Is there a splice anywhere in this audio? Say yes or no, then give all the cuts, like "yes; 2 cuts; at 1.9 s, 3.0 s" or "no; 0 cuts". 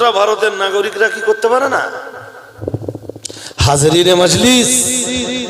yes; 1 cut; at 2.6 s